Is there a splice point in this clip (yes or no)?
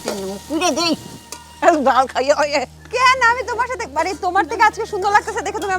no